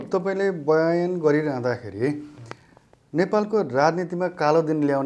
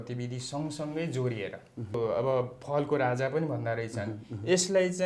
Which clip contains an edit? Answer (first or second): second